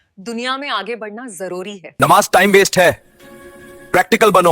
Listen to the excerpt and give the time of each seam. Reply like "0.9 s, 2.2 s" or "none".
1.9 s